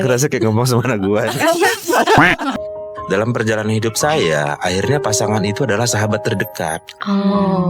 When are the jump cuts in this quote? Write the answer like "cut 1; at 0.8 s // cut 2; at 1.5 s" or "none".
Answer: cut 1; at 2.5 s